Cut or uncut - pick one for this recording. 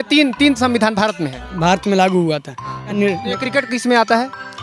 cut